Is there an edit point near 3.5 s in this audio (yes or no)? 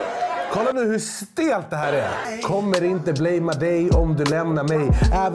no